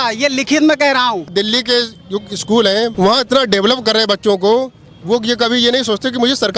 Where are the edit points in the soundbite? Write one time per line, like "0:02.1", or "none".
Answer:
0:01.3
0:02.9